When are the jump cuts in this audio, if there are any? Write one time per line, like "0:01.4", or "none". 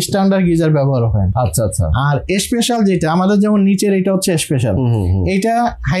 none